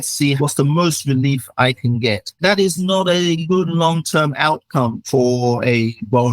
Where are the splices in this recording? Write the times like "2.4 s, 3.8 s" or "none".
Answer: 2.3 s, 3.4 s, 5.0 s